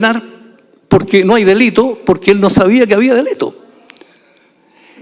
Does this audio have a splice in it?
no; 0 cuts

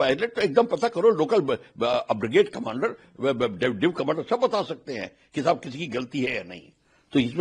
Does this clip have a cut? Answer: no; 0 cuts

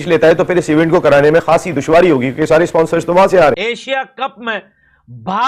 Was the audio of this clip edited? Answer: yes; 1 cut; at 3.6 s

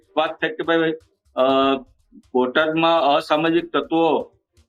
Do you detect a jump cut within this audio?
no; 0 cuts

